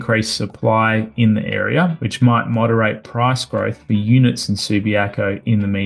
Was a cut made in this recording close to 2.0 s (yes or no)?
yes